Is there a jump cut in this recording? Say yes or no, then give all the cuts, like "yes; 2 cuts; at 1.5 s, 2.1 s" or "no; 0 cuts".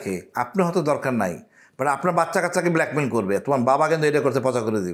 no; 0 cuts